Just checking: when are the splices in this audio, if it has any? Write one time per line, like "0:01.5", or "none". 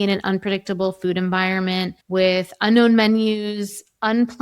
0:02.0